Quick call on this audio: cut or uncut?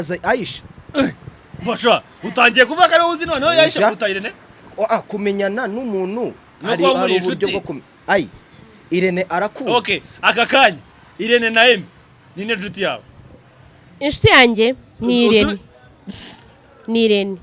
uncut